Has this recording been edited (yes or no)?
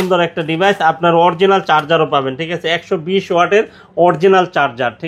no